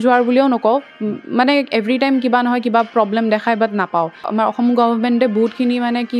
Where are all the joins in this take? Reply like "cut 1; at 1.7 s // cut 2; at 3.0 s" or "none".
cut 1; at 4.5 s

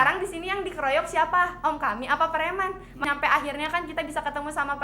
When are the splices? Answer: cut 1; at 3.0 s

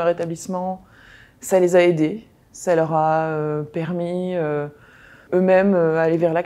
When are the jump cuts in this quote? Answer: cut 1; at 5.3 s

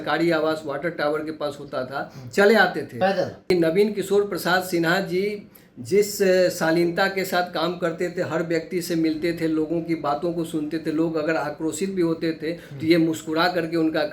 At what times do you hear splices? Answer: cut 1; at 3.5 s

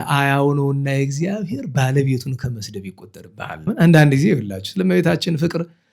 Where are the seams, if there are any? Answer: cut 1; at 3.7 s

